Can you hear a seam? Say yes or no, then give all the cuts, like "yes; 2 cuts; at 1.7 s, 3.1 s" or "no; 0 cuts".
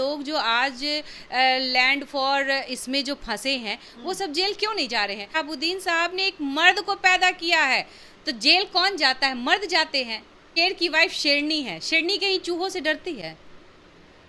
yes; 2 cuts; at 5.3 s, 10.5 s